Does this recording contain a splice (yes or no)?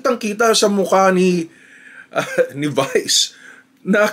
no